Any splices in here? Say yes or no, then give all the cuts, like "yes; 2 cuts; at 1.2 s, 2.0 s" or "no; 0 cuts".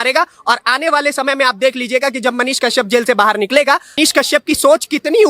yes; 1 cut; at 4.0 s